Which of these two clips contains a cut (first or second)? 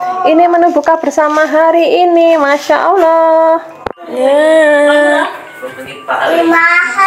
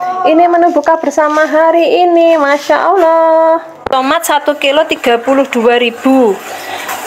second